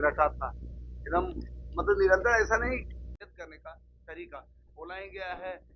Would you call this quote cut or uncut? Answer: cut